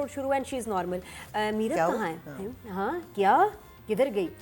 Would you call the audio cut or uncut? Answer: uncut